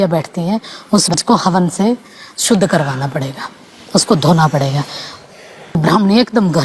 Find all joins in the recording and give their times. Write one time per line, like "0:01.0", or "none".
0:01.1
0:05.8

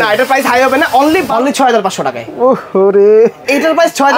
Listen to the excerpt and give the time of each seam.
0:01.3

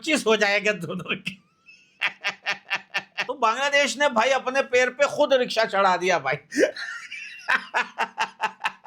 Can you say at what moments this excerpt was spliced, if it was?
0:03.2

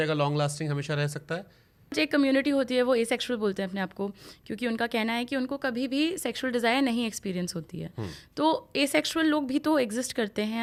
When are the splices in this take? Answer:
none

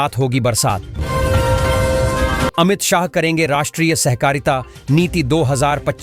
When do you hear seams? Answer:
0:01.0
0:02.5

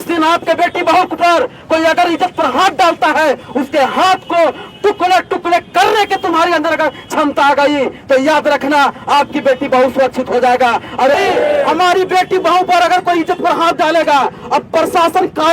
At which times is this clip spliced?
0:11.1

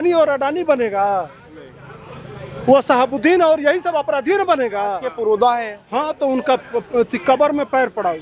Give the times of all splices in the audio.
0:05.1

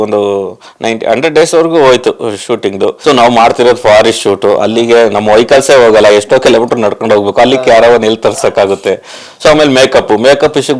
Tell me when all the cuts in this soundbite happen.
0:03.0

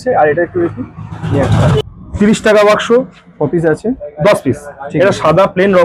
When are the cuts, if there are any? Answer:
0:01.8

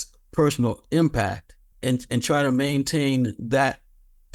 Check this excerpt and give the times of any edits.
0:01.7

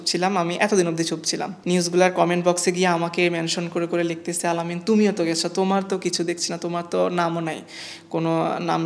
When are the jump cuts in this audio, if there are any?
none

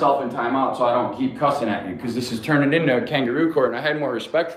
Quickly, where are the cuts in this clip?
none

